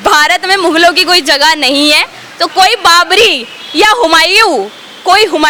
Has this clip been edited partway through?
no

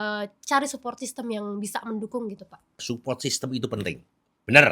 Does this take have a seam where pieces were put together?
yes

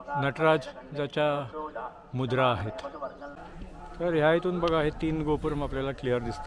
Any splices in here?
yes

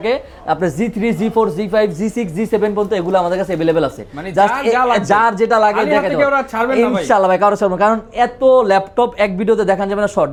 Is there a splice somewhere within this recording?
no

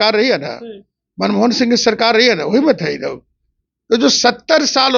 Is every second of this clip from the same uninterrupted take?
yes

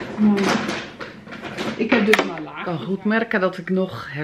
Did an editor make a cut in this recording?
yes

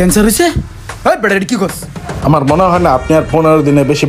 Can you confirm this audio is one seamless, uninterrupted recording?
yes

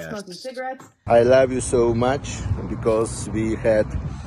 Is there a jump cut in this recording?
yes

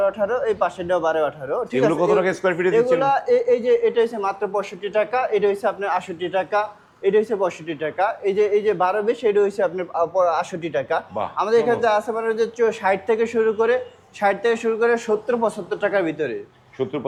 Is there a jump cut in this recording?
no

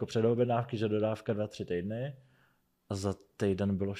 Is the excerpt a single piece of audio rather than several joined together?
yes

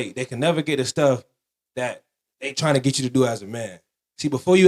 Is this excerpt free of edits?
yes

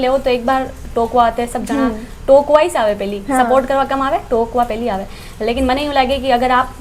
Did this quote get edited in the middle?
no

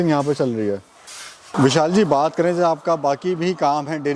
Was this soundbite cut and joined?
no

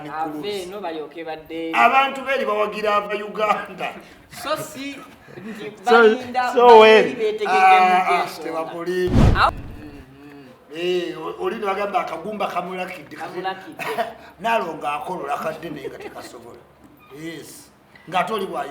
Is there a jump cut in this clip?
yes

